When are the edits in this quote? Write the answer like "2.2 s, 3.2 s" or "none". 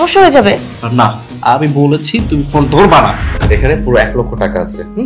3.3 s